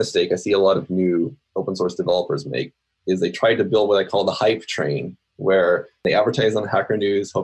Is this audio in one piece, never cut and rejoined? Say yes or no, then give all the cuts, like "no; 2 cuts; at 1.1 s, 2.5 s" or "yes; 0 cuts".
no; 1 cut; at 6.0 s